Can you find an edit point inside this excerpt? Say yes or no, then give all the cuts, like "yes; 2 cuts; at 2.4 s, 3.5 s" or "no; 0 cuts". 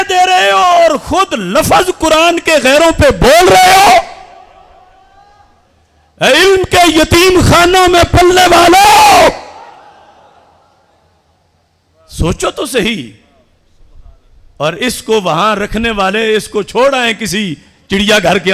no; 0 cuts